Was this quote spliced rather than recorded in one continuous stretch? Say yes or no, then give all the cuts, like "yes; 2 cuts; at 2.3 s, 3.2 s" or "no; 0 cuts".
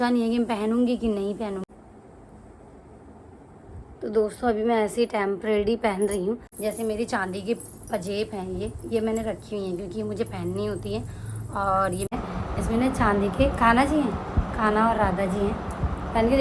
yes; 3 cuts; at 1.6 s, 6.5 s, 12.1 s